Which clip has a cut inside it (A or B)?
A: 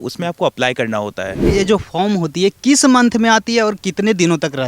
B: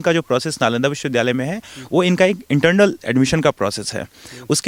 A